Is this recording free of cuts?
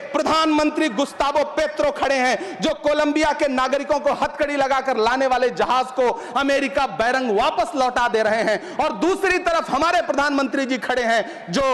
yes; 0 cuts

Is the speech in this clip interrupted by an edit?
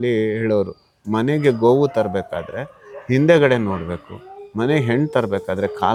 no; 0 cuts

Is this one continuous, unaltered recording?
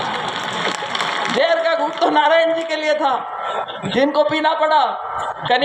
yes; 0 cuts

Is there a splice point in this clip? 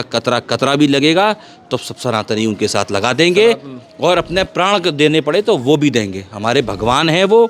no; 0 cuts

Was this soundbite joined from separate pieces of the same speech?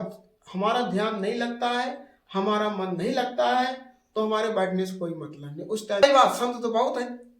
yes; 1 cut; at 6.0 s

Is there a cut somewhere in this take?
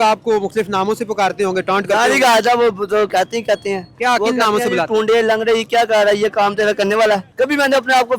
yes; 1 cut; at 7.3 s

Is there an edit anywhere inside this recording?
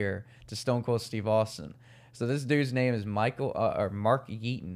no; 0 cuts

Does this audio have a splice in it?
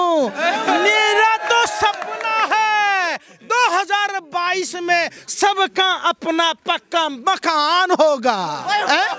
no; 0 cuts

